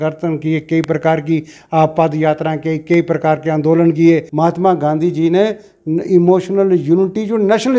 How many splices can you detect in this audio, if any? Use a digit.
1